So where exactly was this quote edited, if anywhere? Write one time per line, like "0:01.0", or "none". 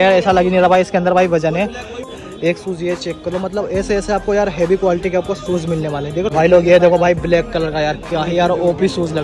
0:02.1
0:06.3

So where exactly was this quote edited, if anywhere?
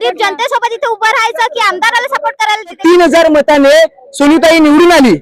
0:02.8

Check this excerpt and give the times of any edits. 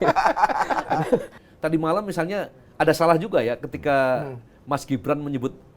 0:01.4

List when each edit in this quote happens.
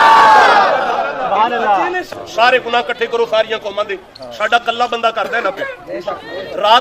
0:02.0

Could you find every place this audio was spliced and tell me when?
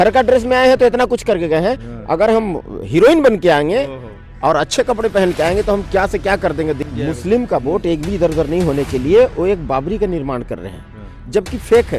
0:06.8

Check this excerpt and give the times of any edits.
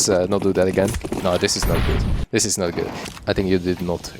0:01.0
0:03.0

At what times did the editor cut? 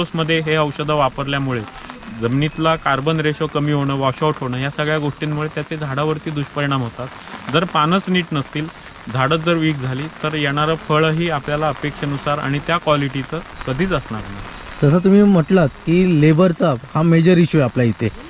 none

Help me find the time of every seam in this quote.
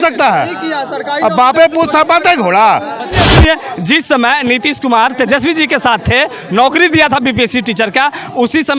0:03.2

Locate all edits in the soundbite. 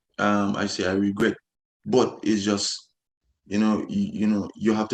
none

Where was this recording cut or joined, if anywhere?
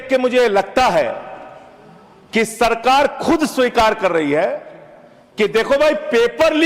none

